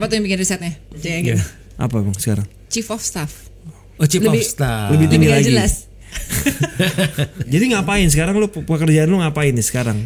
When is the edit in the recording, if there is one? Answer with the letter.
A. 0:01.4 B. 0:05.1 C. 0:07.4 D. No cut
C